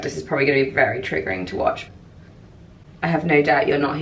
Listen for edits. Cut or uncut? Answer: cut